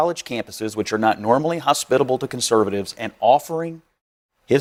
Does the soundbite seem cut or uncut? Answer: uncut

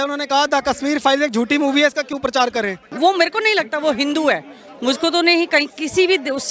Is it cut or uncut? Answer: cut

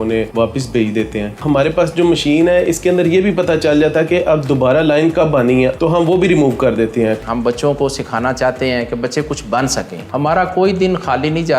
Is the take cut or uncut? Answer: cut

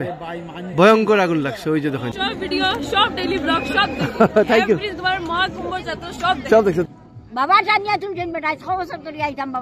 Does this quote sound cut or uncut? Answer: cut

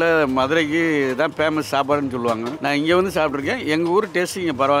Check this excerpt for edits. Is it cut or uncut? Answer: uncut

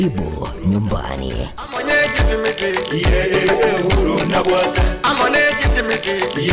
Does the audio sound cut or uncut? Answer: cut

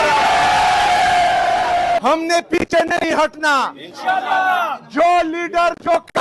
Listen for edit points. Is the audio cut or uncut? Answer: cut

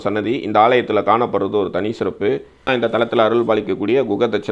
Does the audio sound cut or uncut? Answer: cut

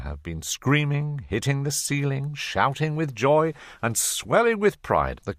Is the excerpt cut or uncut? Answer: uncut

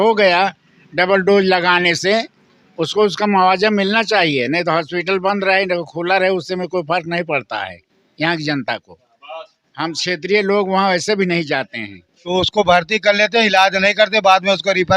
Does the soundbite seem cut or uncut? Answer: cut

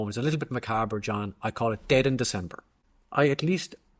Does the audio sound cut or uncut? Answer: cut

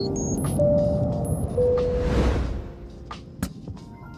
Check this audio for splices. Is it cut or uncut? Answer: uncut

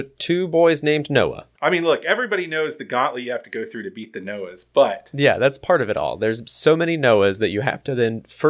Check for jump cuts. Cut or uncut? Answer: cut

